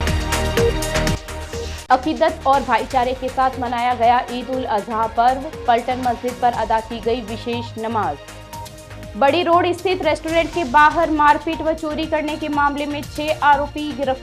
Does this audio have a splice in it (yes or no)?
yes